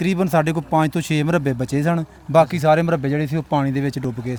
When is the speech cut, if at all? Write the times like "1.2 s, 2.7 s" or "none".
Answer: none